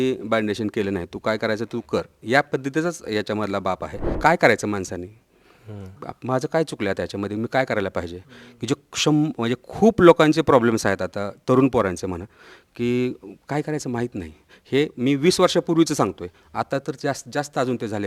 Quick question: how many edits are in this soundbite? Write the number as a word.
one